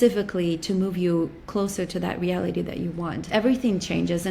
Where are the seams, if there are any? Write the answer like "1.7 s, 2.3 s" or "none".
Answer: 3.3 s